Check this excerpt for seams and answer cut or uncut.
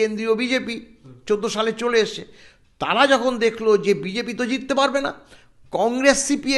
uncut